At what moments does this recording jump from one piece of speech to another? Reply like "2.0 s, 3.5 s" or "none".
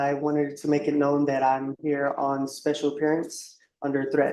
none